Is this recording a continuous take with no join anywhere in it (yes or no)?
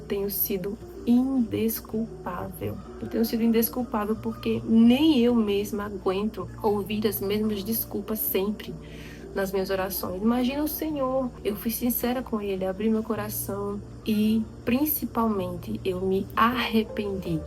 no